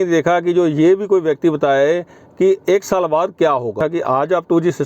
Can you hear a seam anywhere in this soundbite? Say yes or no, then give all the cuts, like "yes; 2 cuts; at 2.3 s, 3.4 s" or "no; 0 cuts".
yes; 1 cut; at 3.8 s